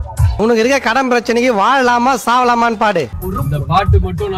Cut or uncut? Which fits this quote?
cut